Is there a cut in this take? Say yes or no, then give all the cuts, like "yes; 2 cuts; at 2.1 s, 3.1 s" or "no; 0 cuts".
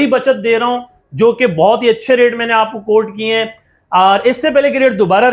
no; 0 cuts